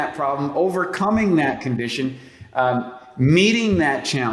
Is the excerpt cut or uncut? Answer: uncut